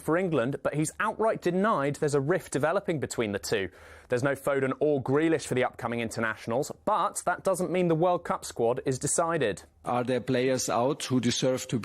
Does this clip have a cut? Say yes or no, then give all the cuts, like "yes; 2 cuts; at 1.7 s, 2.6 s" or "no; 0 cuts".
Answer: yes; 1 cut; at 9.7 s